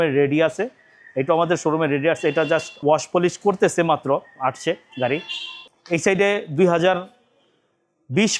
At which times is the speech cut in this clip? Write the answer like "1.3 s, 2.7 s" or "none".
none